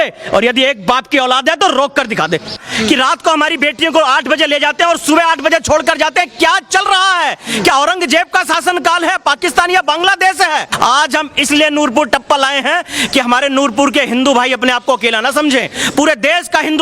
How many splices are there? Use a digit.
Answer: 2